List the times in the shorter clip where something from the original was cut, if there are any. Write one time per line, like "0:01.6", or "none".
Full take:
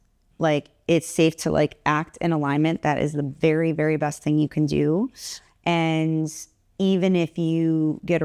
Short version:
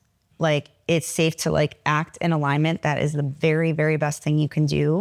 none